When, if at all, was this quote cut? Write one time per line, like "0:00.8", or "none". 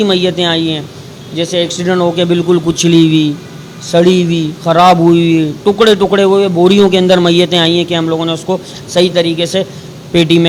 none